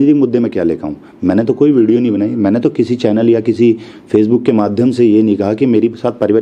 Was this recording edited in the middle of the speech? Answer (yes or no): no